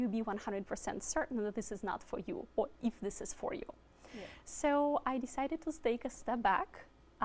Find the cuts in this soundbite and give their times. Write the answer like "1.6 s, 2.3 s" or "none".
none